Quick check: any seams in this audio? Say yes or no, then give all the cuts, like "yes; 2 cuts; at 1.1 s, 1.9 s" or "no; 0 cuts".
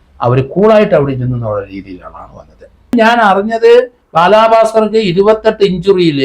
yes; 1 cut; at 2.9 s